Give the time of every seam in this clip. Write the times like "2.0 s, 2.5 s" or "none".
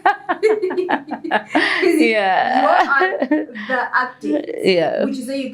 none